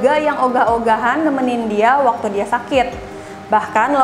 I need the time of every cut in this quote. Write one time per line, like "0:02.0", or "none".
none